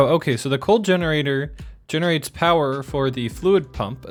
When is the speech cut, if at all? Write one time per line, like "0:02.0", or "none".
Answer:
none